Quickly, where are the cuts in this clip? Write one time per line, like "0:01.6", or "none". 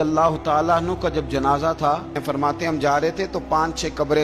0:02.2